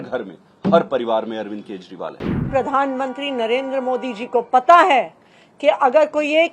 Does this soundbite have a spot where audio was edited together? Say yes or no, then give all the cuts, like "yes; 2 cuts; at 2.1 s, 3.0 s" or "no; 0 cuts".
yes; 1 cut; at 2.3 s